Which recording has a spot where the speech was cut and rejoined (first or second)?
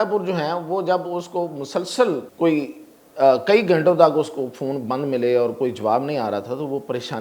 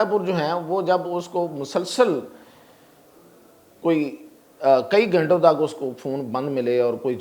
first